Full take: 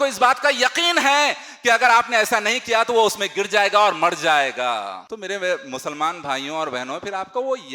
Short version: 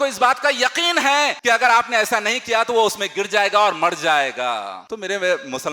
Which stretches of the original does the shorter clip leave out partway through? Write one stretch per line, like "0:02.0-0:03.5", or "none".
0:01.4-0:01.6